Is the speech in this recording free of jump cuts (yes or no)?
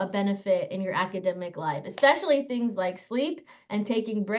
yes